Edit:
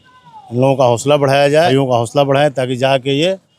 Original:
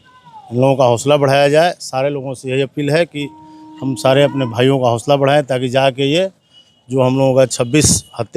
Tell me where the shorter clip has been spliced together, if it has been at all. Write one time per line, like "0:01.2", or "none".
0:01.7